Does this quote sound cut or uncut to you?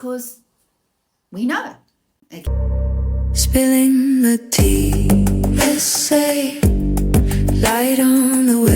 cut